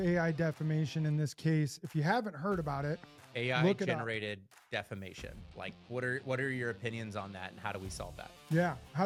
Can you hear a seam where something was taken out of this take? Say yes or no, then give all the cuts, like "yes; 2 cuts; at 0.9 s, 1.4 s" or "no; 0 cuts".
no; 0 cuts